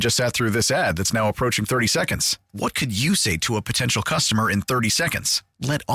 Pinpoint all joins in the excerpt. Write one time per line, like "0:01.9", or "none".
none